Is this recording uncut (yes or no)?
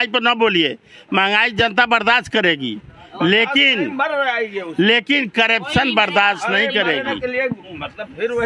yes